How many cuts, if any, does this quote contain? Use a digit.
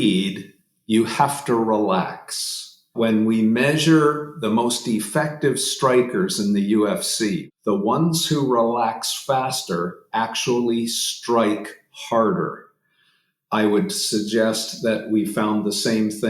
3